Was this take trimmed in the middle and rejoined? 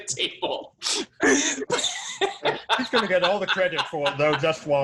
no; 0 cuts

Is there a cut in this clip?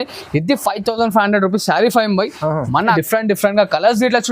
yes; 1 cut; at 3.0 s

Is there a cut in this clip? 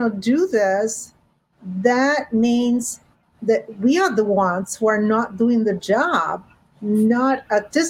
no; 0 cuts

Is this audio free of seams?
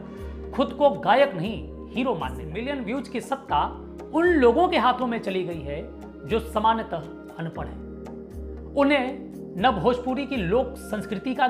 no; 1 cut; at 2.5 s

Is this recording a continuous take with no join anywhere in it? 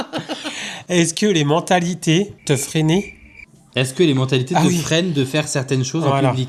yes; 0 cuts

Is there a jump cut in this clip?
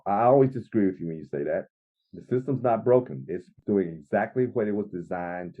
yes; 1 cut; at 3.6 s

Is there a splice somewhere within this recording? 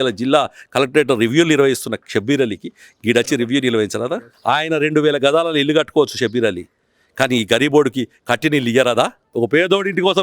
yes; 2 cuts; at 4.3 s, 9.2 s

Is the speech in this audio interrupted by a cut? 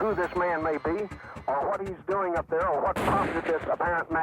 no; 0 cuts

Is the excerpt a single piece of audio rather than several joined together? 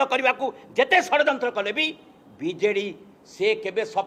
yes; 0 cuts

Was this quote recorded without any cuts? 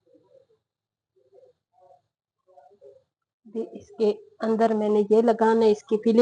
yes; 0 cuts

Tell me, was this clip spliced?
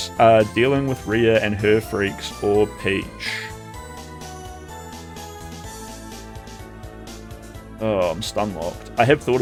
no; 0 cuts

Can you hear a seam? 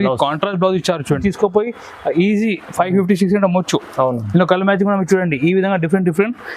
yes; 1 cut; at 1.2 s

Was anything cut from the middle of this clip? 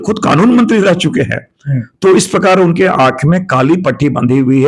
no; 0 cuts

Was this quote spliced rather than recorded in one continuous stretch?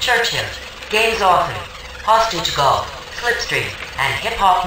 no; 0 cuts

